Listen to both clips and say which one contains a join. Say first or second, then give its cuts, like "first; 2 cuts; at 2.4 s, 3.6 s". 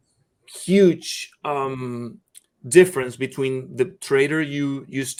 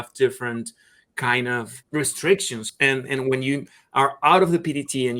second; 2 cuts; at 1.8 s, 2.6 s